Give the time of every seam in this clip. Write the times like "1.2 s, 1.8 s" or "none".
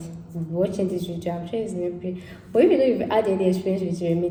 none